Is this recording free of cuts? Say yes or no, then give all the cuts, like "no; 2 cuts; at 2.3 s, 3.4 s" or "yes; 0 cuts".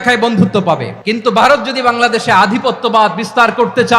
no; 1 cut; at 0.9 s